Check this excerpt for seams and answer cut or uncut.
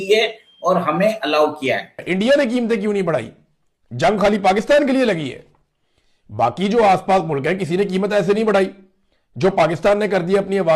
cut